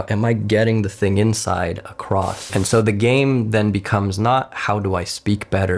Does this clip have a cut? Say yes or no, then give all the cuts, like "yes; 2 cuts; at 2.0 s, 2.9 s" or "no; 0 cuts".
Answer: yes; 1 cut; at 2.4 s